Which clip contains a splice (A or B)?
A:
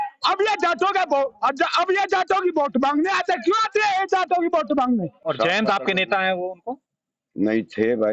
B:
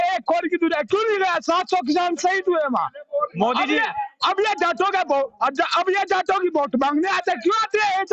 A